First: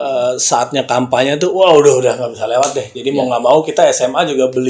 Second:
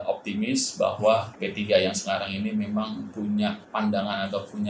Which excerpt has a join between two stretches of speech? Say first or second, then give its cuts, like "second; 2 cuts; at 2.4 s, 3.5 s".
second; 2 cuts; at 1.4 s, 3.6 s